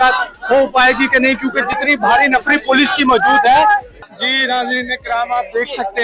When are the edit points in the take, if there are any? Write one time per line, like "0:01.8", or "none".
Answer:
0:03.9